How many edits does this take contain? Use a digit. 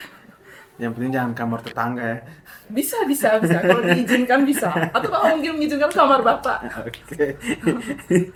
0